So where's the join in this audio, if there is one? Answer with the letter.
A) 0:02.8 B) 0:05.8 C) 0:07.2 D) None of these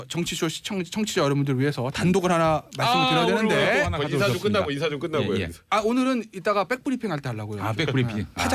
D